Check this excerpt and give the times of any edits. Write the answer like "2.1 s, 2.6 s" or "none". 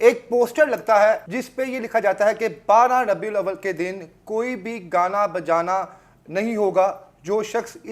1.4 s